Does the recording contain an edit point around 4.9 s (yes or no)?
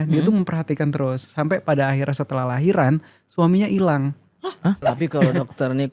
yes